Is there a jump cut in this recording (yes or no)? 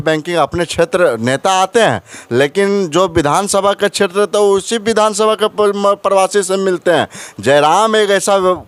no